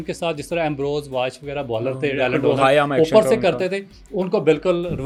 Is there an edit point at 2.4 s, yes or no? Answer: no